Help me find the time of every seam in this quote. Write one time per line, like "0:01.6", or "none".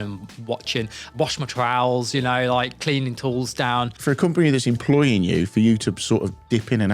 0:01.1
0:04.0